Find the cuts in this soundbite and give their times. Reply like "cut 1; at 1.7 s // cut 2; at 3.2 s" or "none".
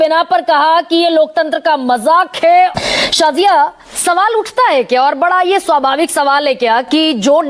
cut 1; at 2.8 s